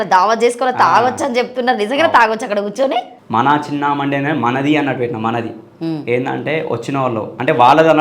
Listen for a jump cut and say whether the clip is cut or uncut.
cut